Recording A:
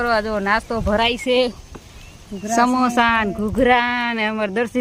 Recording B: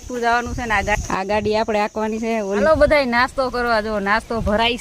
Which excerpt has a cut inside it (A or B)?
B